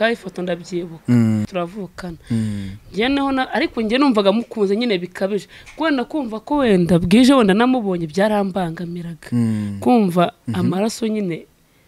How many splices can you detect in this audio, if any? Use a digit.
1